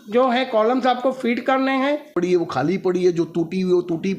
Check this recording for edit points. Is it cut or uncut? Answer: cut